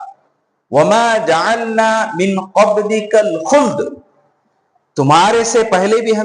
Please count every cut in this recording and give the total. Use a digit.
0